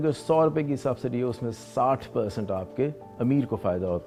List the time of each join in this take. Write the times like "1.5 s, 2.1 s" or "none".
none